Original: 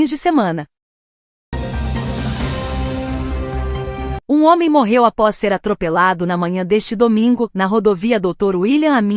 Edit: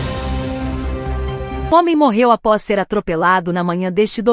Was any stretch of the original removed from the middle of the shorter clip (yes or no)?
yes